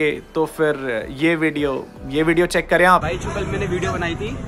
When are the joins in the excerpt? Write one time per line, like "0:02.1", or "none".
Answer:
none